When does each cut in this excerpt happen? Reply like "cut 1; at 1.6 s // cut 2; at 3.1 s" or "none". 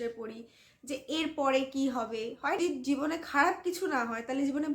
cut 1; at 2.6 s